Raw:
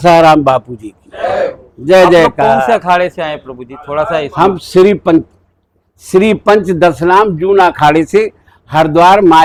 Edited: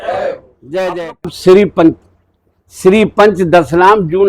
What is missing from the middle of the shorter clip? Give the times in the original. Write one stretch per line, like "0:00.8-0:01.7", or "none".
0:02.4-0:04.6